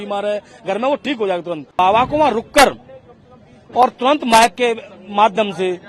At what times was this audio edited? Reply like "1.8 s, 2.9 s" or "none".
1.8 s